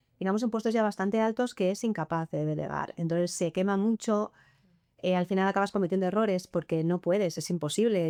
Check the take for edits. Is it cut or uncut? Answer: uncut